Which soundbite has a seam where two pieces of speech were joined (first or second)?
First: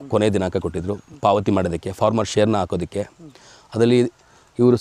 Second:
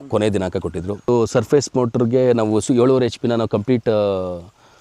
second